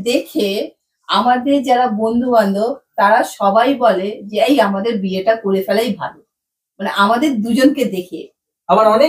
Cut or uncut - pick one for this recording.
uncut